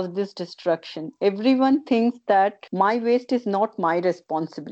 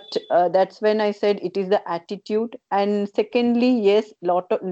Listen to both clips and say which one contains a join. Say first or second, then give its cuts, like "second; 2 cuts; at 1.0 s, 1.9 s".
first; 1 cut; at 2.6 s